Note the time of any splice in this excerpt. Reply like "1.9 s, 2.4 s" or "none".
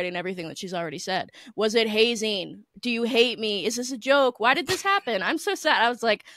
none